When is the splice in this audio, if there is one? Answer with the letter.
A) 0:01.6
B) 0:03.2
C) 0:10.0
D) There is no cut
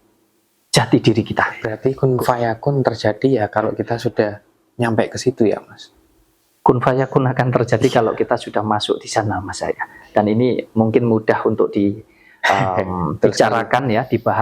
A